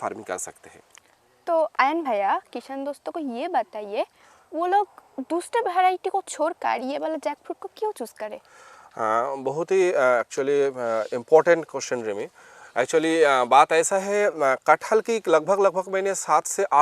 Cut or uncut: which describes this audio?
uncut